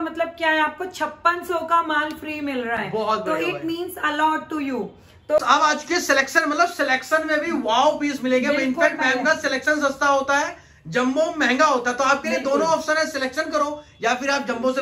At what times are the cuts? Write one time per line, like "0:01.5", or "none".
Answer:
none